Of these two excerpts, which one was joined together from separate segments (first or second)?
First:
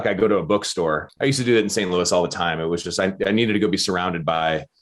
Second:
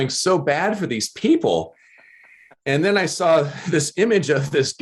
first